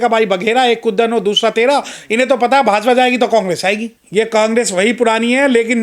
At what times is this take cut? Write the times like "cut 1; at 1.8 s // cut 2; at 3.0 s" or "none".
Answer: cut 1; at 3.9 s